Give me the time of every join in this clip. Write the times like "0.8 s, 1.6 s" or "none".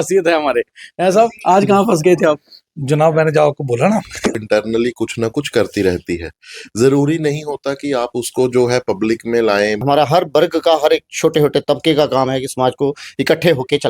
4.4 s, 9.8 s

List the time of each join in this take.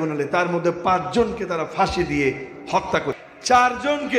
3.3 s

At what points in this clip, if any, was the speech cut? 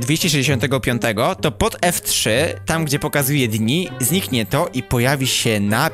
none

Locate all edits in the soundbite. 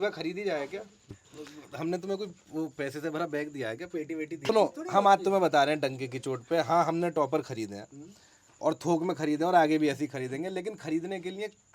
1.1 s, 4.5 s

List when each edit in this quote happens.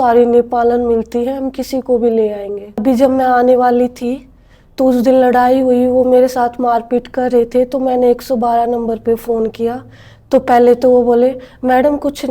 2.8 s

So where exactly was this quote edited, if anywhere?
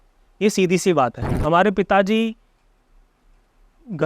1.3 s

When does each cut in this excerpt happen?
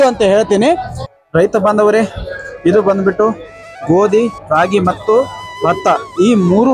1.1 s

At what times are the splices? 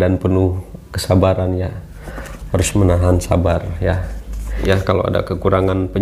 4.6 s

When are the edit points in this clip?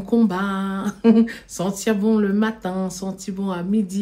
none

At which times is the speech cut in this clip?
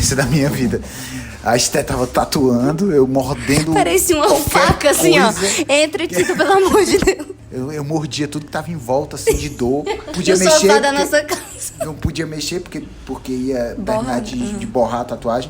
7.4 s, 10.1 s

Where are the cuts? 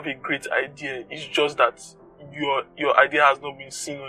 none

